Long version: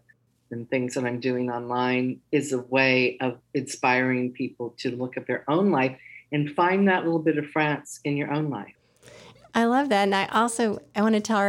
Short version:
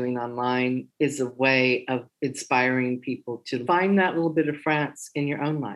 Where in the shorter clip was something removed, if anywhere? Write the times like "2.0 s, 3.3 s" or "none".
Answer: 3.6 s